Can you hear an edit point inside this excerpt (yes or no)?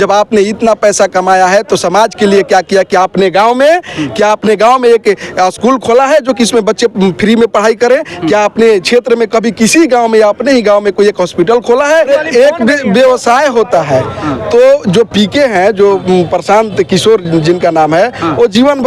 yes